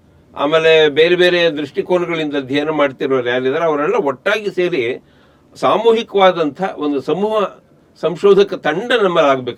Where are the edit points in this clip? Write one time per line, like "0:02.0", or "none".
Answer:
none